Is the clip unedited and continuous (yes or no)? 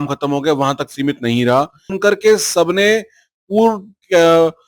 no